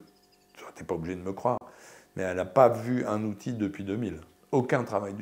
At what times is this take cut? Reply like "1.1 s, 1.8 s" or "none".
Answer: 4.3 s